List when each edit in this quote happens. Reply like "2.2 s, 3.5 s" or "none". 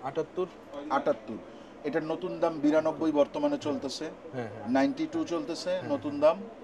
none